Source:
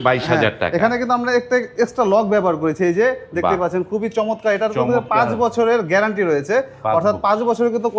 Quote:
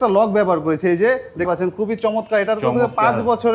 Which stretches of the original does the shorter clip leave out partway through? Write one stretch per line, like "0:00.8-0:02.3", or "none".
0:03.4-0:03.6